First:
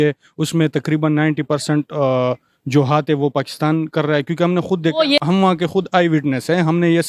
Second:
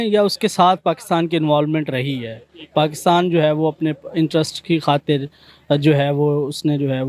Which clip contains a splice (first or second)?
first